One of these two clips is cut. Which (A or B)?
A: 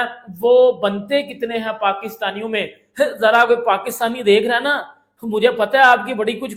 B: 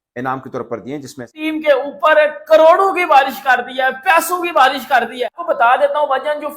B